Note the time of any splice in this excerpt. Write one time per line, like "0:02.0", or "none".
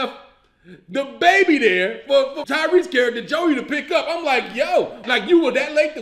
0:02.4
0:05.0